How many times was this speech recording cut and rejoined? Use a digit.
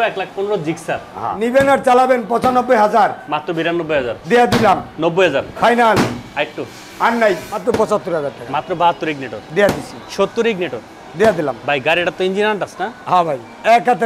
2